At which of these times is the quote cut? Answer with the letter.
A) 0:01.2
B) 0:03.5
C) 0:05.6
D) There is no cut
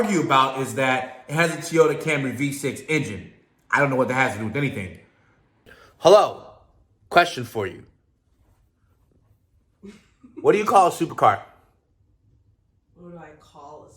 C